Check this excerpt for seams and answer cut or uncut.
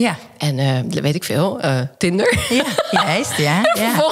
uncut